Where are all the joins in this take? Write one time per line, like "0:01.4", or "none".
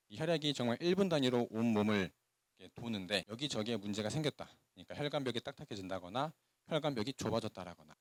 none